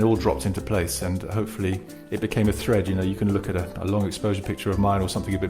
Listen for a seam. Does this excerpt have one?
yes; 1 cut; at 2.0 s

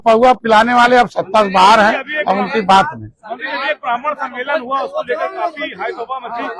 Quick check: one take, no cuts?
yes; 0 cuts

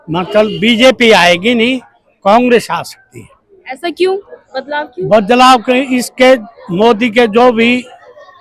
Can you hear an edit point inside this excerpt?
yes; 1 cut; at 1.2 s

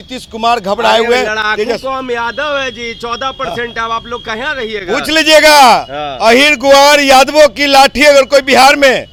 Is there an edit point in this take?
no; 0 cuts

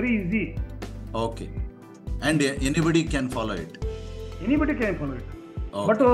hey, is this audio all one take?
yes; 0 cuts

